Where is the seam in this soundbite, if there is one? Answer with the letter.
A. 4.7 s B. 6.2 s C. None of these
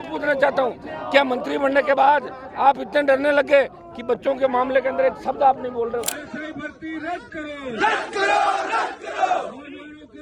B